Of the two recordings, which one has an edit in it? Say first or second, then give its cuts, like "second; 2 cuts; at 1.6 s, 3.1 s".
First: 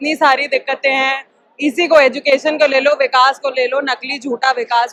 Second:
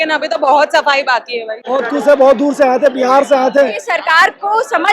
second; 2 cuts; at 1.6 s, 3.8 s